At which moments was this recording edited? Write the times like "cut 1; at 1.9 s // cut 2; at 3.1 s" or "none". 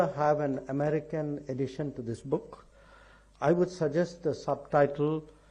none